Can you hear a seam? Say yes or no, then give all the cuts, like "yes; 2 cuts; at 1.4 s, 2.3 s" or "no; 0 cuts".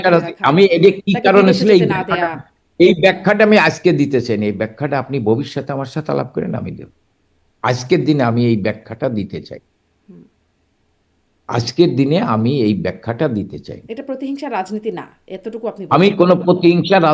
no; 0 cuts